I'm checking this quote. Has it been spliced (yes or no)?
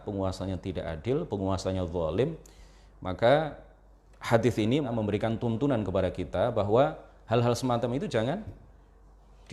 yes